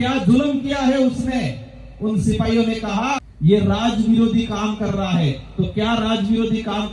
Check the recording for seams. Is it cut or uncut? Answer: cut